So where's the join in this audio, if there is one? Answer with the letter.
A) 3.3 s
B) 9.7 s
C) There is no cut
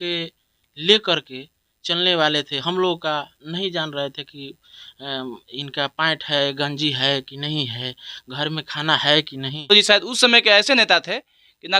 B